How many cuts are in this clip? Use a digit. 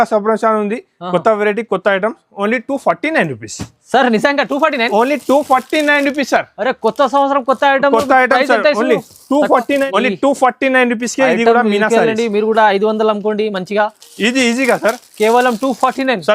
1